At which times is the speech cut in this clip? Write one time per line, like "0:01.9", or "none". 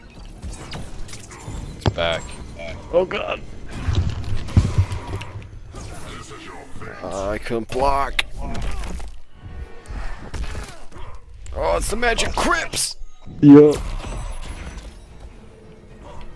none